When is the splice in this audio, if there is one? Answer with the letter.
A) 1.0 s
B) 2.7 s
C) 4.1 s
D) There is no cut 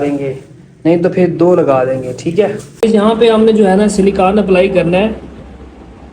B